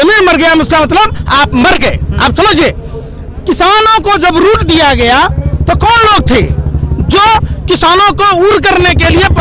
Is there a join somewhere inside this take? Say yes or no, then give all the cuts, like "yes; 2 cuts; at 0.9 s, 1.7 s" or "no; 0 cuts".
no; 0 cuts